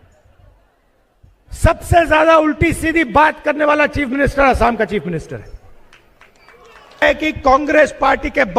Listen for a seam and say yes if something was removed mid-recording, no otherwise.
yes